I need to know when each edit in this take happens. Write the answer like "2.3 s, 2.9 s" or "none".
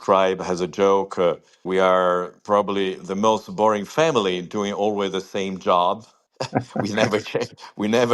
none